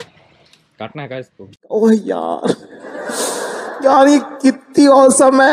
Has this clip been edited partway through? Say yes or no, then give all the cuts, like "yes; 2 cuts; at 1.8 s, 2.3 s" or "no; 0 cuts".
no; 0 cuts